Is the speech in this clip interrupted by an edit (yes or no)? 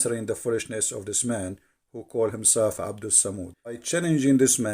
yes